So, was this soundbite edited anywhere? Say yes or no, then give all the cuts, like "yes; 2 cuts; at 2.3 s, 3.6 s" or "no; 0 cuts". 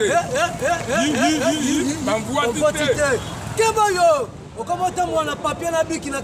no; 0 cuts